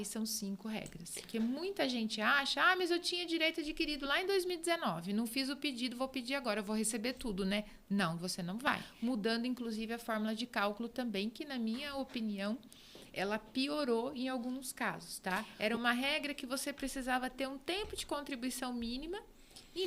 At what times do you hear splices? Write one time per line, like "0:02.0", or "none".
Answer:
0:01.2
0:08.9
0:15.5